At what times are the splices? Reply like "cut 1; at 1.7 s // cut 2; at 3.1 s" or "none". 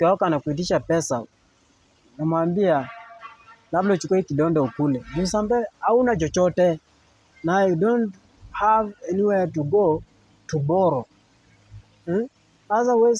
none